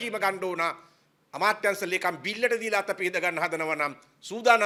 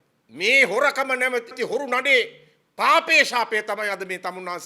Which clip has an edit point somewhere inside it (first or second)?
second